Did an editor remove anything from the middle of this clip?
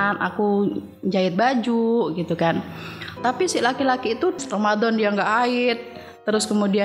yes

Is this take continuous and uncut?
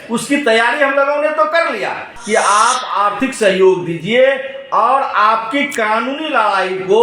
no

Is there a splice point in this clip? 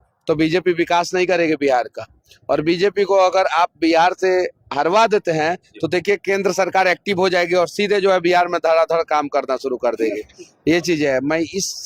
no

